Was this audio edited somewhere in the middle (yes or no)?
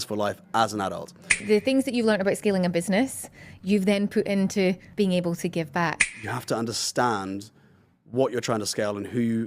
yes